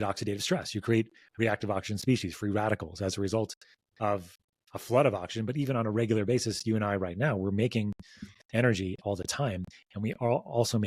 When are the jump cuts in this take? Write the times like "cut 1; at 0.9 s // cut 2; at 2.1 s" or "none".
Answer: none